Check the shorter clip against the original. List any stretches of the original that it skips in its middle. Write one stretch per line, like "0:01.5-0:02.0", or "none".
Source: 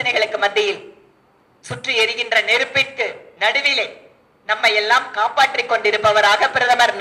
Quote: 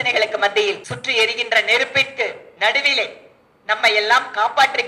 0:00.9-0:01.7